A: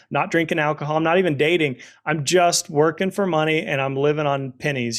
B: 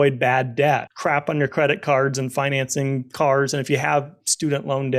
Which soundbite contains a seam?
B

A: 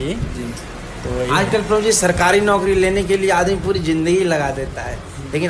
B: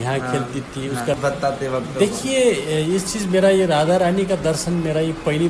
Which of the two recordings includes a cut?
B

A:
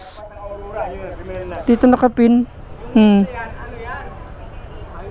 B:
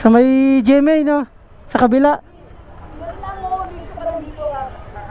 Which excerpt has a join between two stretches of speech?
A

